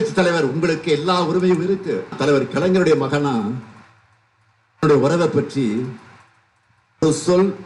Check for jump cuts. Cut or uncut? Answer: cut